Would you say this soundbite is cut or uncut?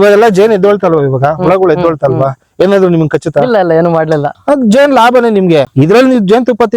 cut